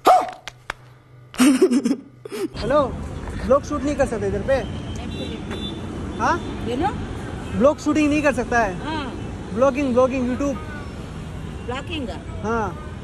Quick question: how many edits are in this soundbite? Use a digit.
1